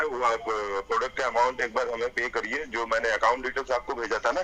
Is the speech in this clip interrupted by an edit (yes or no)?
no